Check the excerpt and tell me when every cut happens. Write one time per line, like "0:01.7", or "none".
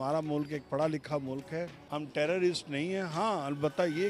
0:01.8